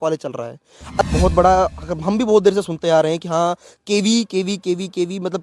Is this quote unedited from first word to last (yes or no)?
no